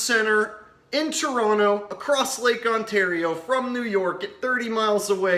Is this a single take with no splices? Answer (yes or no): yes